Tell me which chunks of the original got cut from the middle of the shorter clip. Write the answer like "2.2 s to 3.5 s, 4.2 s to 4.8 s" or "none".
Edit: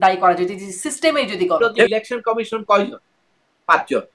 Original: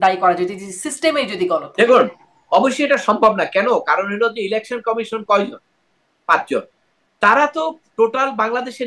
1.9 s to 4.5 s